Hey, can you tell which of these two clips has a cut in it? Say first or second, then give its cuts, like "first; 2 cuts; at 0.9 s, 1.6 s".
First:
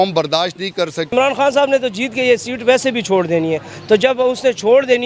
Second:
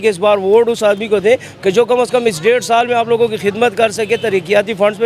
first; 1 cut; at 1.1 s